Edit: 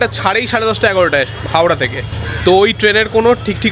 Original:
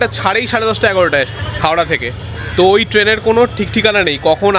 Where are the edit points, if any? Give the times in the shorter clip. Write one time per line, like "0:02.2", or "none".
0:01.6